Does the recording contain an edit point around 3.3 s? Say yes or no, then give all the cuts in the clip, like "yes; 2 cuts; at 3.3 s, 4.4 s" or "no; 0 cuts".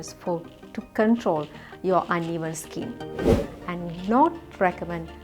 yes; 1 cut; at 3.3 s